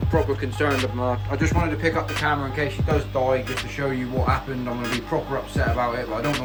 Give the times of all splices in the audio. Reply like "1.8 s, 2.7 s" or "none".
none